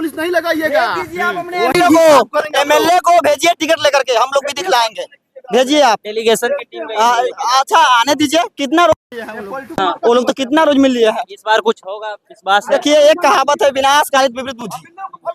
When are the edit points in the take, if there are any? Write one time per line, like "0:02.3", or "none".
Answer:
none